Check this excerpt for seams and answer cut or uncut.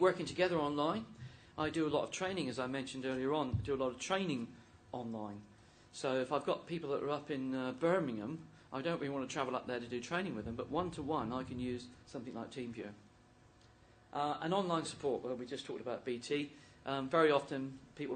uncut